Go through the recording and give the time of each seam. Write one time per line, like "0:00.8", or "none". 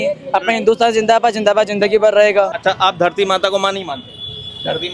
0:02.5